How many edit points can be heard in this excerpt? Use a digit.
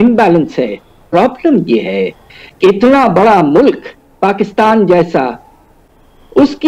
1